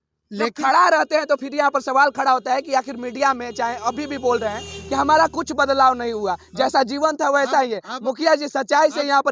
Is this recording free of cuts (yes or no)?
yes